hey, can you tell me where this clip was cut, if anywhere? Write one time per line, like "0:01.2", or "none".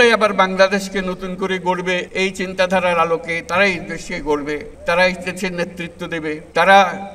0:02.0
0:04.7